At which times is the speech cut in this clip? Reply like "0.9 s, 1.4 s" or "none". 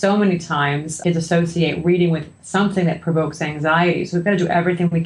0.9 s